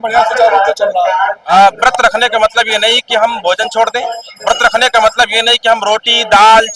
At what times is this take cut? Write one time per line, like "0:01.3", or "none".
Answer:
0:01.4